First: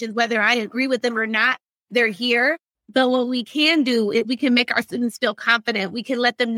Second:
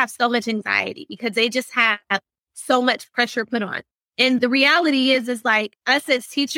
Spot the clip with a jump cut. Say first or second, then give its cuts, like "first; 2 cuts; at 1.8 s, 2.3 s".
second; 1 cut; at 4.0 s